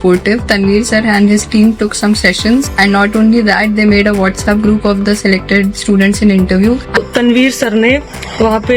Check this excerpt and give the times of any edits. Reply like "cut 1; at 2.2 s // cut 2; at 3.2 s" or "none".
cut 1; at 7.0 s